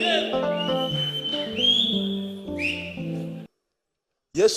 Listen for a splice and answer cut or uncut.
cut